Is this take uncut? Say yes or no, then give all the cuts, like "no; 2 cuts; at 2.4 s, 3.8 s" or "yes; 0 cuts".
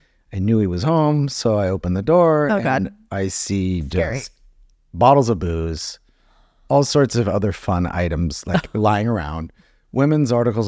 yes; 0 cuts